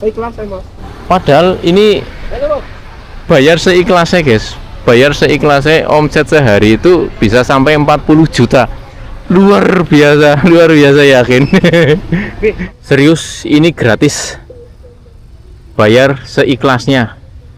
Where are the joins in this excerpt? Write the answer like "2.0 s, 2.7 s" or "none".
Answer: 0.9 s, 12.7 s